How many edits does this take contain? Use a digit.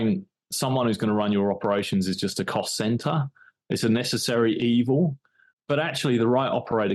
1